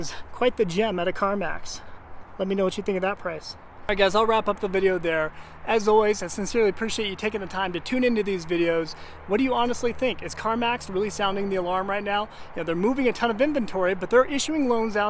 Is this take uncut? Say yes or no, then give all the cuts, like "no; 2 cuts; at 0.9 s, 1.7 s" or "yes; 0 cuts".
yes; 0 cuts